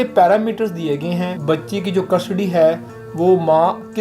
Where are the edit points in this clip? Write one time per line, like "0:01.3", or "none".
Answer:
0:01.4